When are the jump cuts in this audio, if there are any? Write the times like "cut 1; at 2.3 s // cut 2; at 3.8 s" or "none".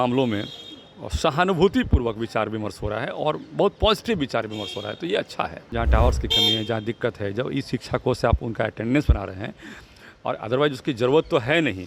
cut 1; at 5.6 s

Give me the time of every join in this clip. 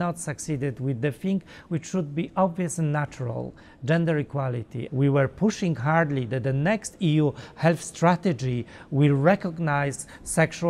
cut 1; at 4.8 s

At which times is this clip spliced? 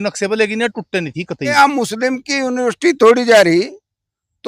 cut 1; at 1.5 s

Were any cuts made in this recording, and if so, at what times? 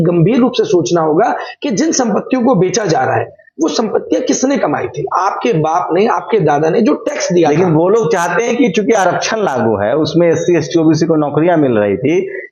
none

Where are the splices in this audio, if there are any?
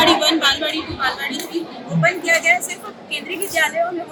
none

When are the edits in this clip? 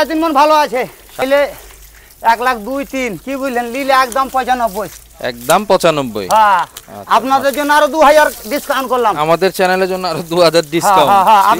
cut 1; at 1.2 s

